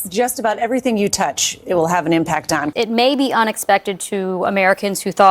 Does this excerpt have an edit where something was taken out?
yes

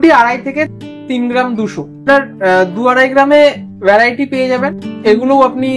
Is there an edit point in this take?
yes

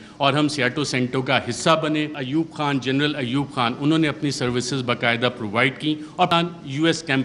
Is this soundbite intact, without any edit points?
no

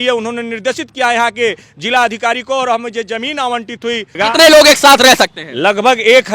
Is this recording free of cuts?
no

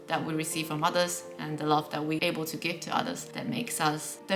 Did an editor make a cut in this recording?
yes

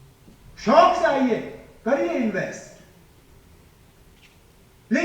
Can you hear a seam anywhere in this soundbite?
no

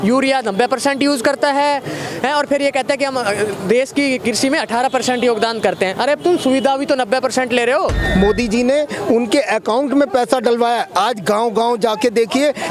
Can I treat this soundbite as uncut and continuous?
no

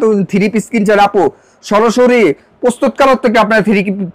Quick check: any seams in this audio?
no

